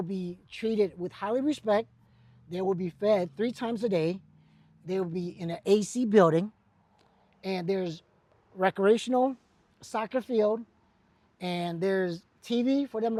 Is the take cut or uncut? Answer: uncut